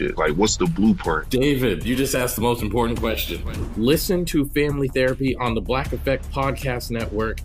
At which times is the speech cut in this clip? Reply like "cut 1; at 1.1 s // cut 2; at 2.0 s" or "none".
none